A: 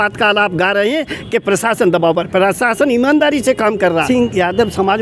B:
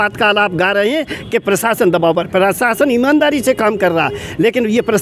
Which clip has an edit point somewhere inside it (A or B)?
A